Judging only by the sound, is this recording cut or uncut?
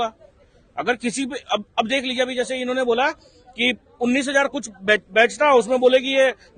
uncut